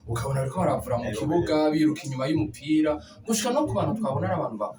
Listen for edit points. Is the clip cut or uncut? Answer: uncut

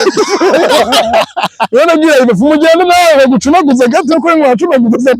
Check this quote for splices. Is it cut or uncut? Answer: uncut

